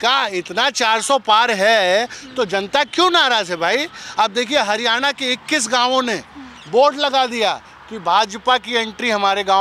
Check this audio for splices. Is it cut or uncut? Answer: uncut